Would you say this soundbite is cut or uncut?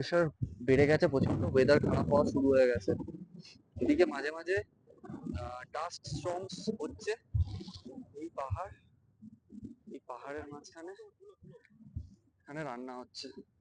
uncut